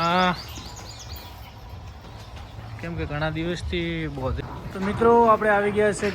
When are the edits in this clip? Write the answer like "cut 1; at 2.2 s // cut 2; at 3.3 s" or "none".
cut 1; at 4.4 s